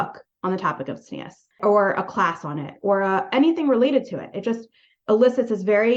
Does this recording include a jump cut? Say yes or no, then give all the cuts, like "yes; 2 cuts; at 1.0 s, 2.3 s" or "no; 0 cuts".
no; 0 cuts